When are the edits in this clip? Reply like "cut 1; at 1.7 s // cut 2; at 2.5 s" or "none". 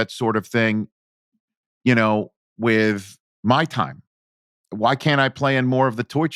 none